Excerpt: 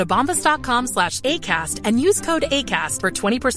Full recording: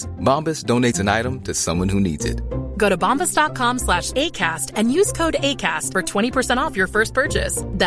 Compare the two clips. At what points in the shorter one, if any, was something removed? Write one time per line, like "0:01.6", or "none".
none